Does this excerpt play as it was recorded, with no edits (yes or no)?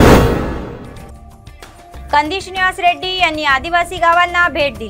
yes